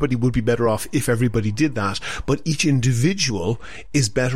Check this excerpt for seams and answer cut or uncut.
uncut